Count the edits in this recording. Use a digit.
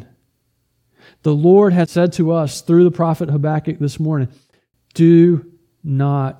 1